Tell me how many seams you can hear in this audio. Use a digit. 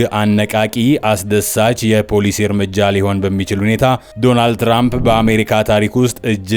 1